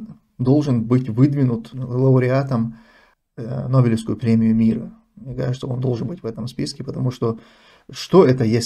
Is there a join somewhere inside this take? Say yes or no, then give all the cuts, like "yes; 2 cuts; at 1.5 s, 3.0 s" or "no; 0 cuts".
no; 0 cuts